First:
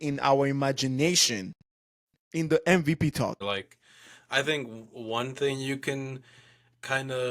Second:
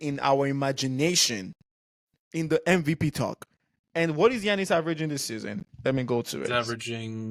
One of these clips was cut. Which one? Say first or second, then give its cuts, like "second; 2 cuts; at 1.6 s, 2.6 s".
first; 1 cut; at 3.4 s